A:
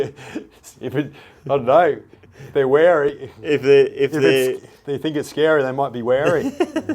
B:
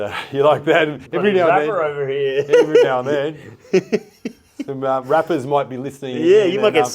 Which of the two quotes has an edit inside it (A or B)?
B